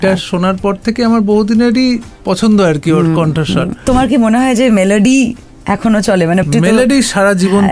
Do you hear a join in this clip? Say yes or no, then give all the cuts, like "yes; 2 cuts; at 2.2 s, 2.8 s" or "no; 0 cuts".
yes; 2 cuts; at 3.9 s, 6.4 s